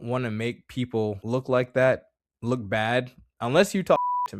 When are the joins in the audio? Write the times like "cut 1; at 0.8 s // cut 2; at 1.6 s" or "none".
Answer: cut 1; at 1.2 s